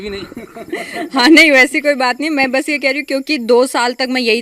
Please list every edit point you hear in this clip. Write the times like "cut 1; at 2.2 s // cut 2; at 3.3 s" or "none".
none